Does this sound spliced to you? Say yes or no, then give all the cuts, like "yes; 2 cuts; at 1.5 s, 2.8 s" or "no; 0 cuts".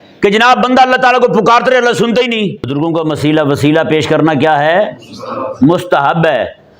yes; 1 cut; at 2.7 s